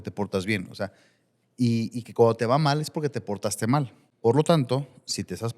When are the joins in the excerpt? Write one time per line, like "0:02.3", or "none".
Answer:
0:04.0